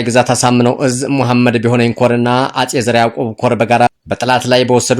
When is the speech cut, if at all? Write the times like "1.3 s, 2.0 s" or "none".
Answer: 3.9 s